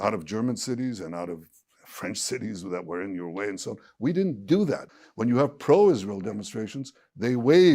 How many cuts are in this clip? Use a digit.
1